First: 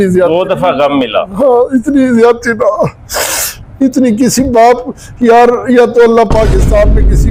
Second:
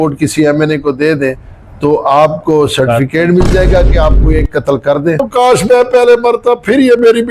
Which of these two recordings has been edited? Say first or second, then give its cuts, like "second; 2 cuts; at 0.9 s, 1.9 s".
second; 1 cut; at 5.3 s